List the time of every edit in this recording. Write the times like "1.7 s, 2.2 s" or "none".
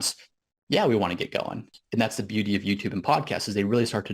1.8 s